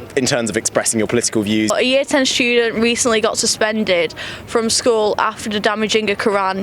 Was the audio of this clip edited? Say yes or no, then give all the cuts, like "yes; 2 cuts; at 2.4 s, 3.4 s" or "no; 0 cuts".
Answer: yes; 1 cut; at 1.7 s